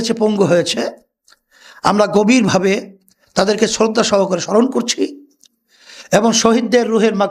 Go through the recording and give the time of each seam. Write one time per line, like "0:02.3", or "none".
none